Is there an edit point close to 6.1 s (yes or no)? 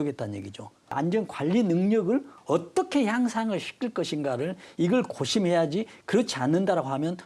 no